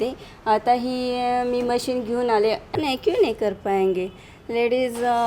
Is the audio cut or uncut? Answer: cut